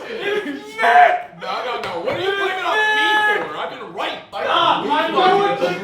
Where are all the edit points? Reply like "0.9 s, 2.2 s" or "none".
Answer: 4.3 s